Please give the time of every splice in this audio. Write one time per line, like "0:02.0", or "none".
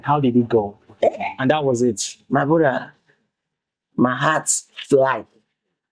0:00.9